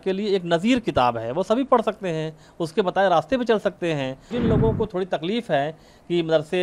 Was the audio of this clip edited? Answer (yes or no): yes